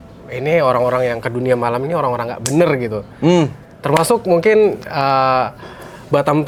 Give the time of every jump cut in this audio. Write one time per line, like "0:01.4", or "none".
none